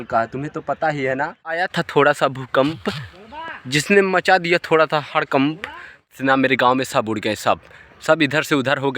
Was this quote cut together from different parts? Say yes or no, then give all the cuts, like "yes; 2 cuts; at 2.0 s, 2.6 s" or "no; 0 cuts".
yes; 2 cuts; at 1.6 s, 6.0 s